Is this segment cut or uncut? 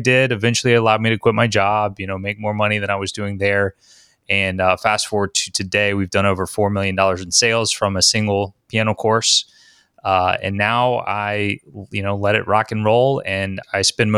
uncut